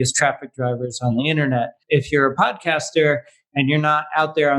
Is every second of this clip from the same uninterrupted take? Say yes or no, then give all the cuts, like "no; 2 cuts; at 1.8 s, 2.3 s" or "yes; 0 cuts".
no; 1 cut; at 1.8 s